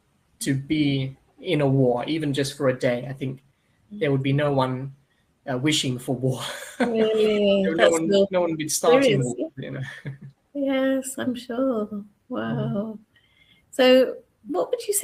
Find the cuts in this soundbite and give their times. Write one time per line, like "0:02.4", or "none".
none